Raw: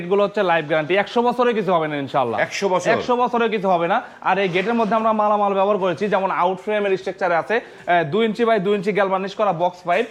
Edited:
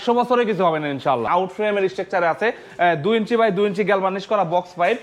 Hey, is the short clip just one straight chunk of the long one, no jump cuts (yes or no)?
no